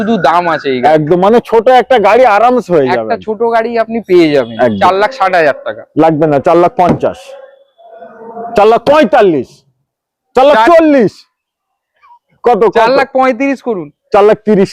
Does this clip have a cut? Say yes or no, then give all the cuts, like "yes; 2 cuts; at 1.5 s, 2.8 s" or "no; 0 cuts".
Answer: yes; 1 cut; at 4.8 s